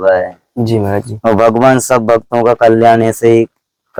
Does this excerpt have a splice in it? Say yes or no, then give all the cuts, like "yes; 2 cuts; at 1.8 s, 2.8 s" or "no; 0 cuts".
no; 0 cuts